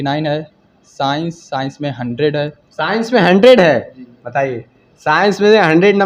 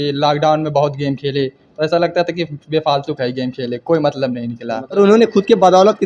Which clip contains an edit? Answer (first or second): second